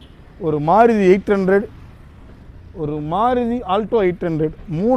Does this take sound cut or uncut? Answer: uncut